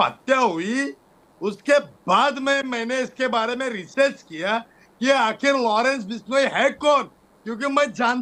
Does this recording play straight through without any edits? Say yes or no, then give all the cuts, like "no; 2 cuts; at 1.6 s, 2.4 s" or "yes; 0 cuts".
yes; 0 cuts